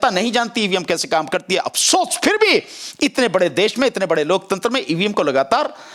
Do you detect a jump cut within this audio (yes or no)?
no